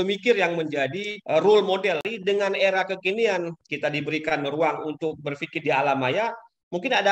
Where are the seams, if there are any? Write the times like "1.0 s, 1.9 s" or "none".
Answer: 1.1 s, 2.1 s, 3.6 s